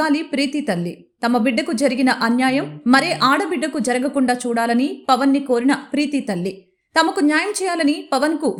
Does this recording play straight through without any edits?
yes; 0 cuts

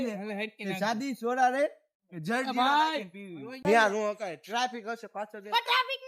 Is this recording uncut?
no; 1 cut; at 3.5 s

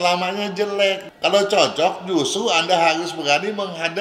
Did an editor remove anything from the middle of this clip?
yes; 1 cut; at 1.1 s

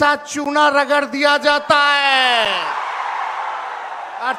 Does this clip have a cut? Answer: no; 0 cuts

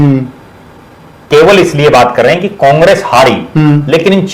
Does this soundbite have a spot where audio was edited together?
yes; 1 cut; at 1.3 s

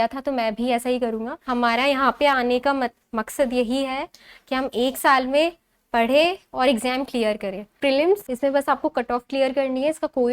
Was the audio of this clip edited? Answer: yes; 2 cuts; at 1.4 s, 8.0 s

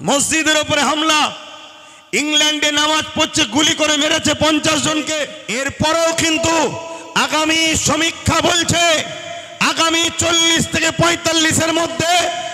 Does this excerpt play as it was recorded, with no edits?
no; 1 cut; at 5.4 s

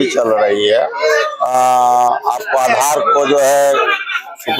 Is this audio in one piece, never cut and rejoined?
yes; 0 cuts

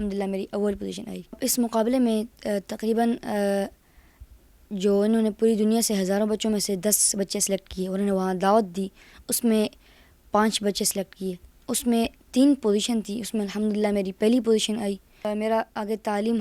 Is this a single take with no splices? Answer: no; 2 cuts; at 1.4 s, 15.2 s

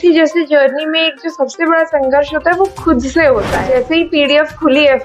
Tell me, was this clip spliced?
yes; 1 cut; at 3.6 s

